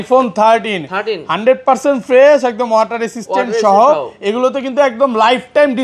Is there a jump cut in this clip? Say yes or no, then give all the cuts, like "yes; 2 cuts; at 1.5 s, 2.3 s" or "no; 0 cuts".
no; 0 cuts